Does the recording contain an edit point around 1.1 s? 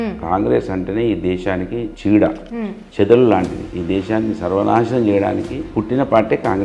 no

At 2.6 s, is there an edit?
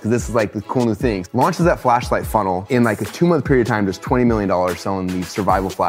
yes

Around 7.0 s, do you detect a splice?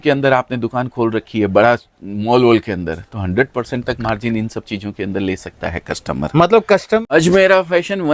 yes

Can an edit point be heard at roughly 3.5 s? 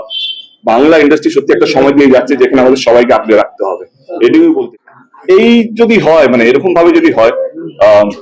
no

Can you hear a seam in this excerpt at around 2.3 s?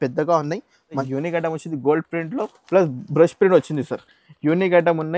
no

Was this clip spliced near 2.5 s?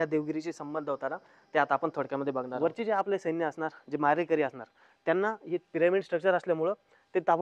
yes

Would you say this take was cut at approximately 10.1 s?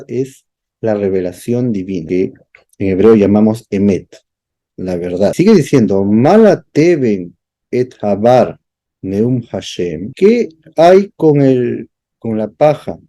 yes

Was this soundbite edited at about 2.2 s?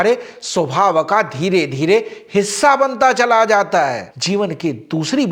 no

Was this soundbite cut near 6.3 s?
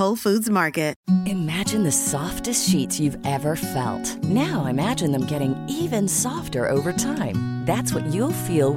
no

